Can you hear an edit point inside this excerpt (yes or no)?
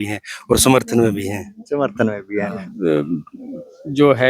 yes